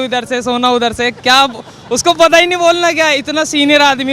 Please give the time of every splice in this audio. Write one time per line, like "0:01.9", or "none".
none